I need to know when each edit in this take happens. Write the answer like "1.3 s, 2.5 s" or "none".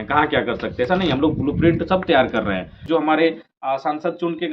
2.9 s